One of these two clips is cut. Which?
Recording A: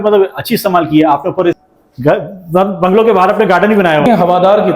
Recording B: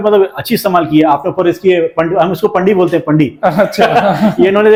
A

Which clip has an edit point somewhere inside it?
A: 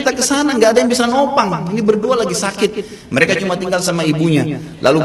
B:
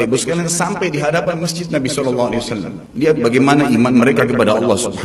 B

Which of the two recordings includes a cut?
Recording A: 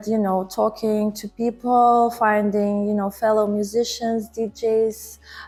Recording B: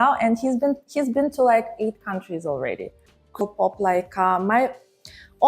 B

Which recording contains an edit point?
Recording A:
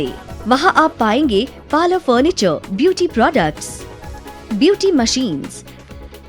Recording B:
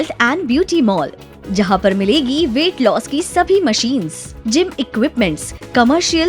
B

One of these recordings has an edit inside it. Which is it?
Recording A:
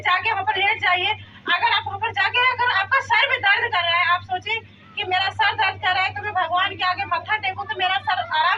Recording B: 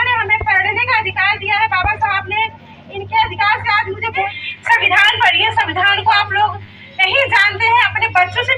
B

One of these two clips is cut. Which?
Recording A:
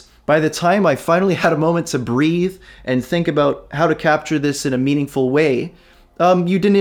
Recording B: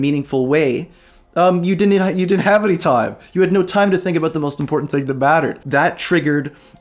B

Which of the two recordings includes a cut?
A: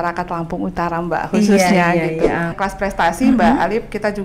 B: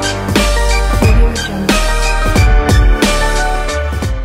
A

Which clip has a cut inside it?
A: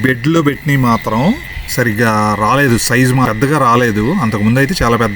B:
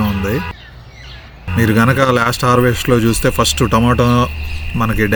A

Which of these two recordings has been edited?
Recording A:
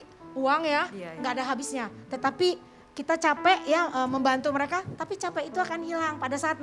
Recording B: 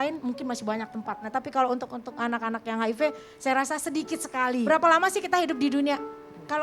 B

